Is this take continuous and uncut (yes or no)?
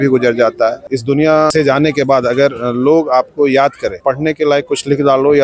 no